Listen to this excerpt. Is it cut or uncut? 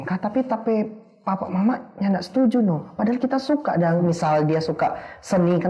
uncut